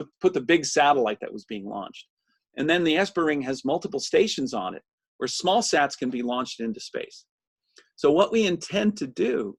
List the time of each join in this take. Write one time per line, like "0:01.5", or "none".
none